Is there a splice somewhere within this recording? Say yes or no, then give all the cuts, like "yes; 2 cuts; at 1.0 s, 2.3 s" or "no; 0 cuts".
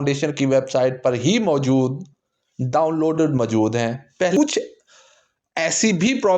yes; 1 cut; at 4.4 s